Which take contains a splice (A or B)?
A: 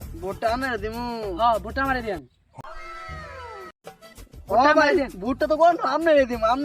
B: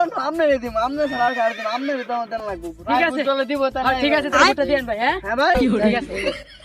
A